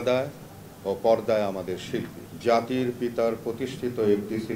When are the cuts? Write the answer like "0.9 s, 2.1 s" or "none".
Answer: 2.2 s